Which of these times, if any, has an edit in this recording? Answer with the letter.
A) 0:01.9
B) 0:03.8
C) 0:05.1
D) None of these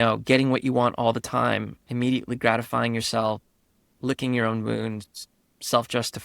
B